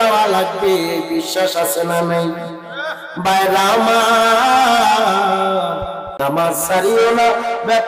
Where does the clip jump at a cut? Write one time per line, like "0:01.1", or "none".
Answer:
0:06.0

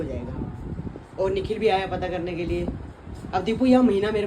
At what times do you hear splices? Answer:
none

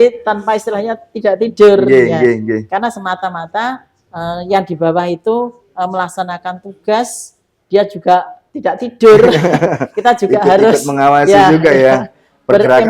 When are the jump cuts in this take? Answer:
0:08.4

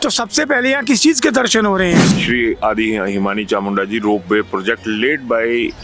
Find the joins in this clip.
0:02.1

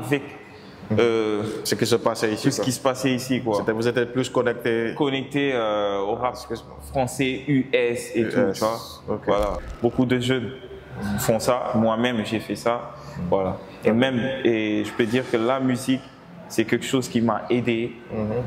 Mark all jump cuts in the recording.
0:09.7

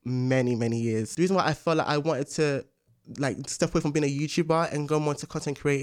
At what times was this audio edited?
0:01.1

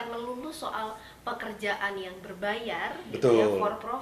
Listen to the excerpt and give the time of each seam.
none

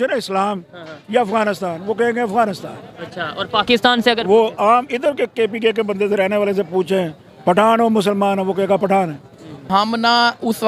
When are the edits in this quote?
0:09.6

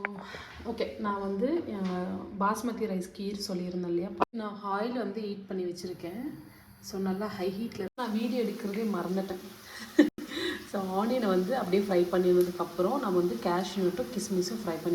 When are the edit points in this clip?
0:04.2
0:07.9

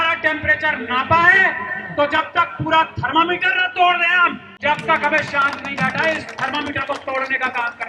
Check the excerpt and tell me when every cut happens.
0:04.5

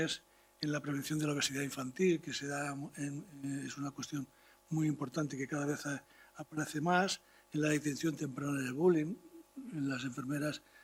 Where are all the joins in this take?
none

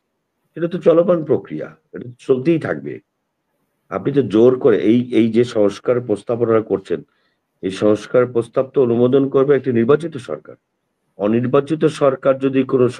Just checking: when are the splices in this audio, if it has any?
none

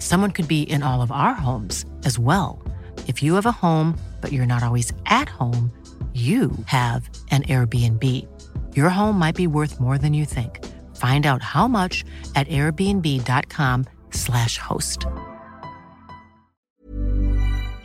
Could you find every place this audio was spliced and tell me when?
0:16.6

